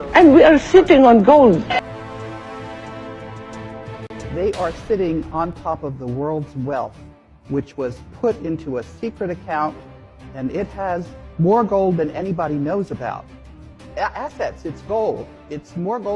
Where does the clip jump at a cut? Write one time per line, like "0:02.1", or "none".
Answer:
0:04.3